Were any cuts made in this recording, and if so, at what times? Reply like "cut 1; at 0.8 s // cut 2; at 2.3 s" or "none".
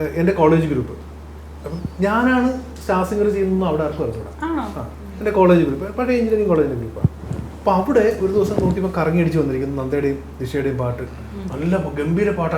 none